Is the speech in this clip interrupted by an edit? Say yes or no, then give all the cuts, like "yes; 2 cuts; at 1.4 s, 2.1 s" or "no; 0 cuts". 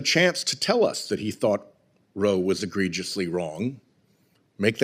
no; 0 cuts